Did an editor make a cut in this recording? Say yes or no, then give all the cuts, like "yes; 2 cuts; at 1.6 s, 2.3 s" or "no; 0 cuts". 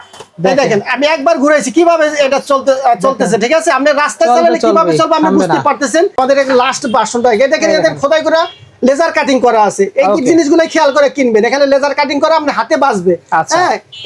yes; 1 cut; at 6.2 s